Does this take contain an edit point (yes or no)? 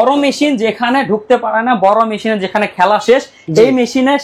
no